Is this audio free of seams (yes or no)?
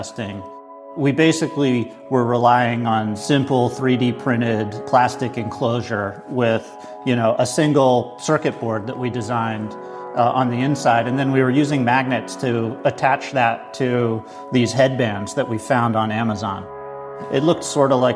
yes